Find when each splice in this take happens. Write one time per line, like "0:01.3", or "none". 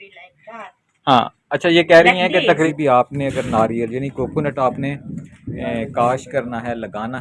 0:02.6